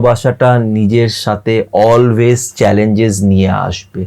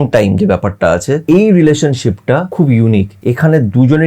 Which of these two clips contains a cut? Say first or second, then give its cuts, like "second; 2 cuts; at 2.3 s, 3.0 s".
second; 3 cuts; at 1.2 s, 2.5 s, 3.1 s